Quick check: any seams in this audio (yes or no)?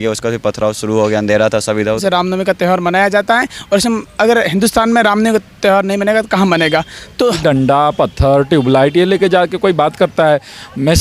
yes